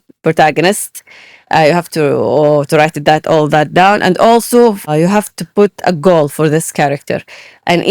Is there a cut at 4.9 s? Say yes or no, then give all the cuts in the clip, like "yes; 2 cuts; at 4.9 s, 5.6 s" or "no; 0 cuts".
yes; 1 cut; at 4.9 s